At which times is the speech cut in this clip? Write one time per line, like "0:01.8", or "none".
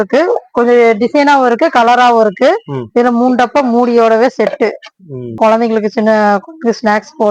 0:05.4